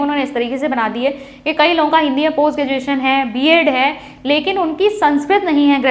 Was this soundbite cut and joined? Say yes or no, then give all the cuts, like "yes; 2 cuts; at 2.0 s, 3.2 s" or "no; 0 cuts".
no; 0 cuts